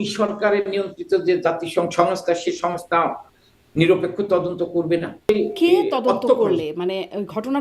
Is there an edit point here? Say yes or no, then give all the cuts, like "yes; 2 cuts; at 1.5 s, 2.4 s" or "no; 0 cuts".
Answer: yes; 1 cut; at 5.3 s